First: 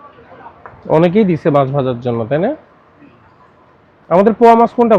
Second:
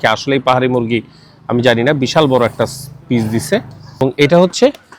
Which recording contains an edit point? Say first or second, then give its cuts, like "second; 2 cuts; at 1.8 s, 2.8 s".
second; 1 cut; at 4.0 s